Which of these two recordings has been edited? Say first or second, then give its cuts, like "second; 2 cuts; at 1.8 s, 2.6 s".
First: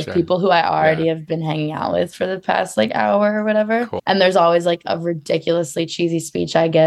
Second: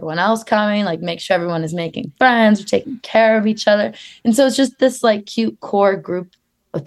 first; 1 cut; at 3.9 s